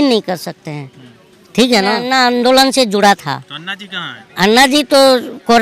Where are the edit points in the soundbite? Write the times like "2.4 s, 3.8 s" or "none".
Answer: 2.0 s